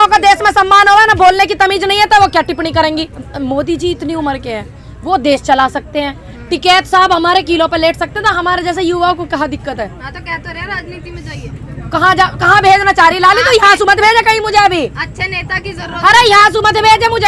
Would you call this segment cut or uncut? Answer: uncut